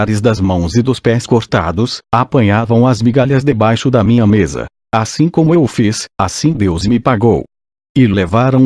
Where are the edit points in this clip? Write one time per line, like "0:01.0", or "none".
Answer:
0:01.0

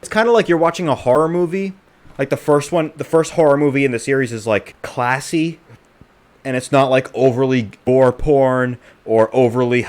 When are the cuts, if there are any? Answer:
0:01.2
0:04.8
0:07.9

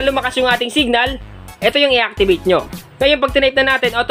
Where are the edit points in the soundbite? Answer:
0:02.8

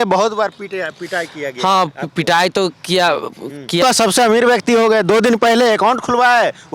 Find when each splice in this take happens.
0:03.8

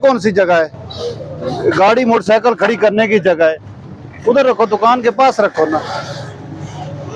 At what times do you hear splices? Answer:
none

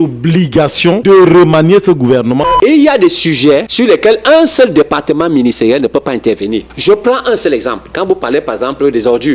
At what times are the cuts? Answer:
0:01.0
0:02.5
0:03.7
0:06.7

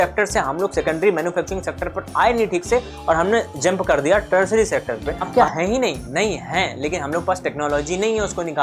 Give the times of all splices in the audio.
0:05.1

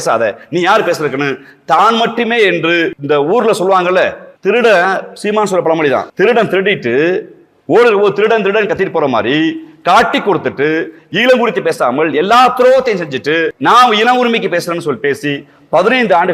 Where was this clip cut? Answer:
0:03.0
0:04.3
0:06.1
0:13.5

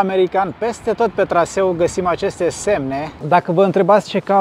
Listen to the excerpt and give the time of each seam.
0:03.1

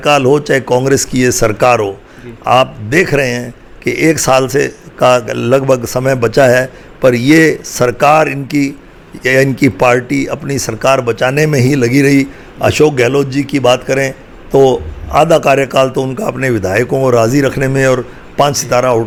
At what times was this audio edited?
none

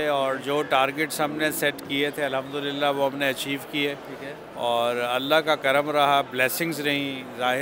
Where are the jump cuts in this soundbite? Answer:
none

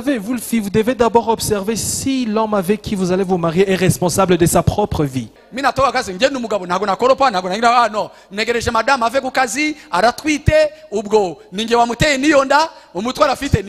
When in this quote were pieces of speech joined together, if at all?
0:05.4

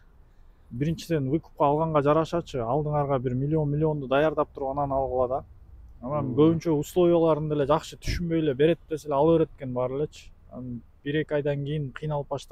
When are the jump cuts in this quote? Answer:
none

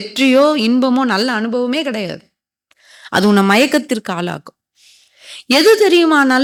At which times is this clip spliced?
none

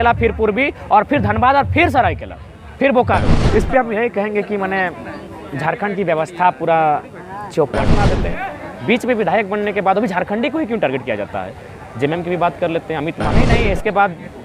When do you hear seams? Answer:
0:03.7
0:08.2
0:13.5

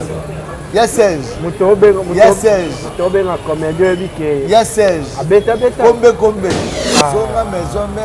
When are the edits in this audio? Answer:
0:06.6

